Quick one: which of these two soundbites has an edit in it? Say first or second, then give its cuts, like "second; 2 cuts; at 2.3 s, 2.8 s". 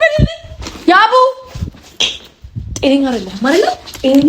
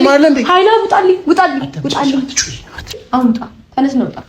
second; 1 cut; at 3.0 s